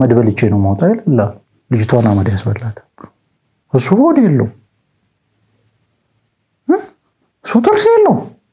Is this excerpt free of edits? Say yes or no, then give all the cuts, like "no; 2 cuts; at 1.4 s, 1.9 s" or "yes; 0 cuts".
yes; 0 cuts